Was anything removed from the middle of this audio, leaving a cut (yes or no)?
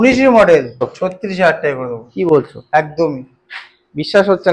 yes